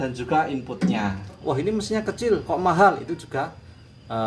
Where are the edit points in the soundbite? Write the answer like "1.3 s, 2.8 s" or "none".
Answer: 1.4 s